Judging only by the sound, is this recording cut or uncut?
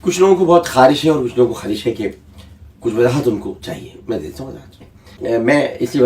cut